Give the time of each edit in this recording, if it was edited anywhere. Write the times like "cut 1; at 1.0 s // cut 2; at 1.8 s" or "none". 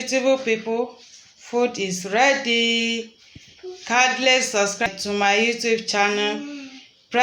cut 1; at 4.9 s